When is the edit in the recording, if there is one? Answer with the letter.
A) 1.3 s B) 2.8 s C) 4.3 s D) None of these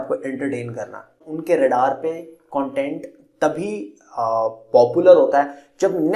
A